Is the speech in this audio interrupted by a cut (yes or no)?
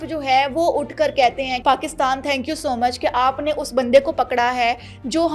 yes